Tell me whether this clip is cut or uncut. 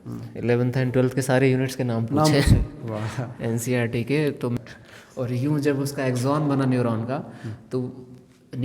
cut